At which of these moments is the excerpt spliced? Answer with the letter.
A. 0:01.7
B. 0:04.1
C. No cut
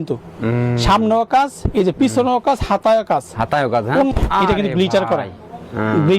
B